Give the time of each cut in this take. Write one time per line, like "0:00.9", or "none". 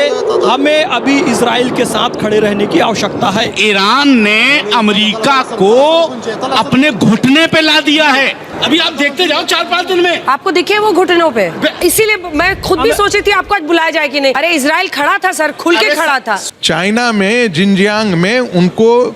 0:03.5
0:08.5
0:11.8
0:14.4
0:16.4